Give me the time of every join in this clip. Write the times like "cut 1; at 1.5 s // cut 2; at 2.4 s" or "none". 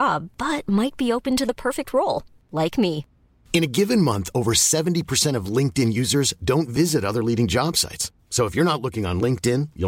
none